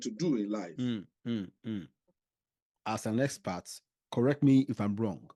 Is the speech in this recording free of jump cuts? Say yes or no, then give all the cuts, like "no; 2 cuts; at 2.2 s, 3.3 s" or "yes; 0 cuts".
yes; 0 cuts